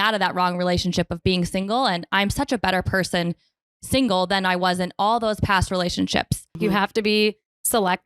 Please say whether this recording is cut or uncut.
cut